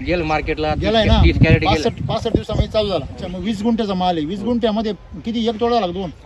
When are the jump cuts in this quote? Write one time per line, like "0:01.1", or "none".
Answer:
0:03.2